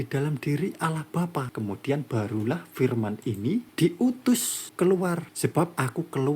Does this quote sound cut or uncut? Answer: cut